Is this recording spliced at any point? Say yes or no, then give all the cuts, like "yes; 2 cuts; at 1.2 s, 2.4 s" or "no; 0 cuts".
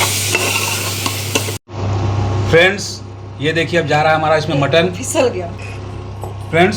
no; 0 cuts